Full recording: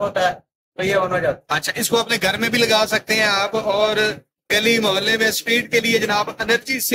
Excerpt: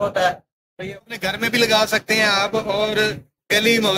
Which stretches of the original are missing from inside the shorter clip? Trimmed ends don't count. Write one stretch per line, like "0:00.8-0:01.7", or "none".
0:01.0-0:02.0